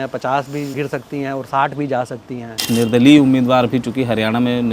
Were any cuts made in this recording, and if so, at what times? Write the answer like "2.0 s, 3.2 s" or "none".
2.6 s